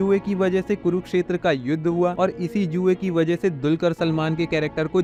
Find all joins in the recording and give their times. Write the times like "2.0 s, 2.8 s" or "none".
none